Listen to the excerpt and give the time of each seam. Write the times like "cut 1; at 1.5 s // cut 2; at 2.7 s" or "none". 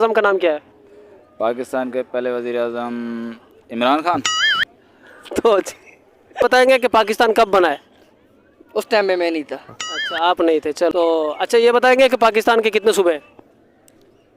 cut 1; at 6.4 s // cut 2; at 10.9 s